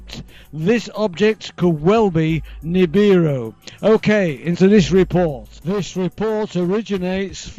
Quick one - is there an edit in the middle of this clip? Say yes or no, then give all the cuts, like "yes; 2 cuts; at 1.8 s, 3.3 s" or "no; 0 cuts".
no; 0 cuts